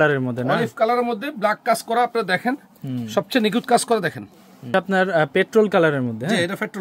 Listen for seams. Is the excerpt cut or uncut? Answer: cut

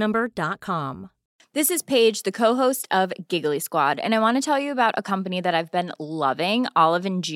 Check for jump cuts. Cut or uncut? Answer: cut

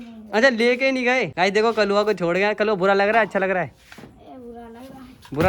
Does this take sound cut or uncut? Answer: cut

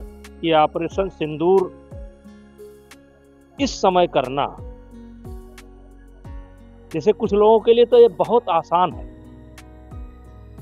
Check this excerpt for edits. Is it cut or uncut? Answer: cut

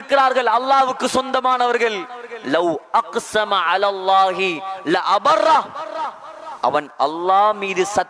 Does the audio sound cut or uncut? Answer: uncut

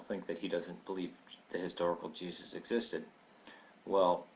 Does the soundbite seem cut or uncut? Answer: cut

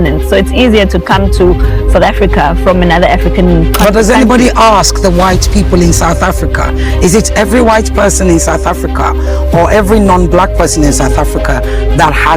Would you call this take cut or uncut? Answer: uncut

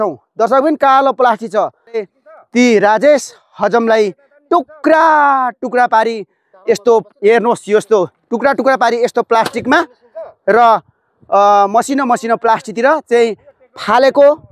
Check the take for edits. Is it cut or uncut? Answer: cut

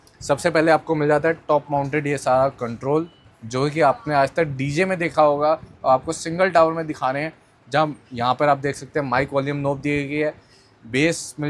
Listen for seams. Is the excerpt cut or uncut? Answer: uncut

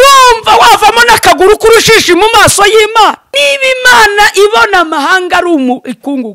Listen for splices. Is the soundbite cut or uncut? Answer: cut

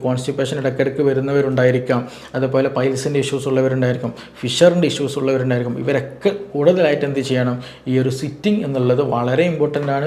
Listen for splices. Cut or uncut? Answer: uncut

